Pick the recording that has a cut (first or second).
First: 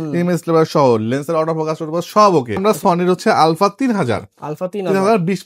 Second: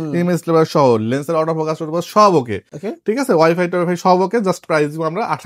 first